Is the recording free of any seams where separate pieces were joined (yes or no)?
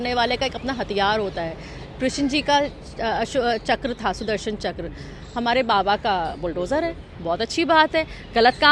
yes